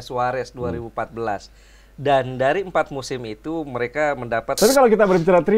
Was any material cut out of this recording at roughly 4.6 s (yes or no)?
yes